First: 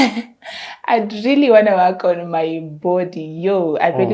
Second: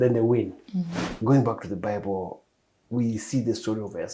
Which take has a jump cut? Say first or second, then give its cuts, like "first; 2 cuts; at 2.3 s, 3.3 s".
second; 1 cut; at 1.0 s